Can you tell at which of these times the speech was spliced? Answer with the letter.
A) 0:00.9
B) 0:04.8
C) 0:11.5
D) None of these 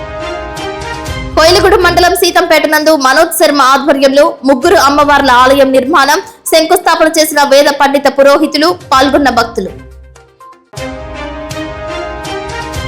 A